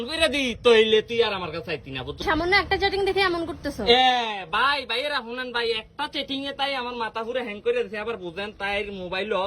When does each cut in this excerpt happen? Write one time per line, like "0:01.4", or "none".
0:02.2